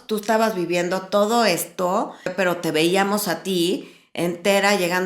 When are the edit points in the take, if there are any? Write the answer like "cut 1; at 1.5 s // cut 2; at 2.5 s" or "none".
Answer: cut 1; at 2.3 s